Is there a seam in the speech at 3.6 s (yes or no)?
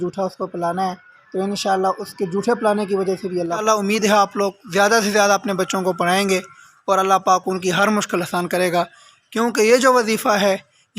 yes